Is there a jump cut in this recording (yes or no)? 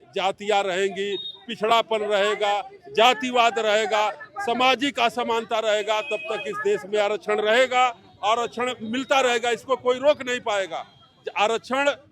no